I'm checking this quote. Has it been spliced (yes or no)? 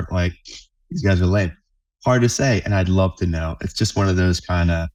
no